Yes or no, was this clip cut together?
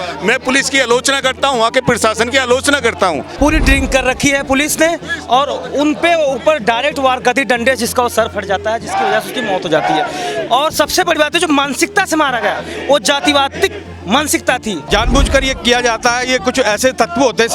yes